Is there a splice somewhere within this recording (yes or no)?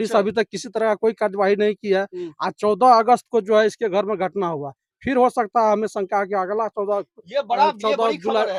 no